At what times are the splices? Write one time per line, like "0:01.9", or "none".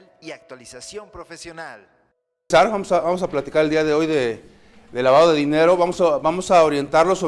0:02.5